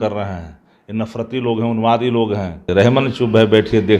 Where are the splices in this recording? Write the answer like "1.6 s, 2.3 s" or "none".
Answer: 2.7 s